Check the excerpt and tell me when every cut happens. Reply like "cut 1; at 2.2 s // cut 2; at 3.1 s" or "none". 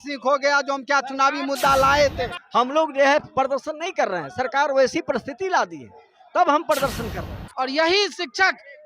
cut 1; at 2.3 s // cut 2; at 7.4 s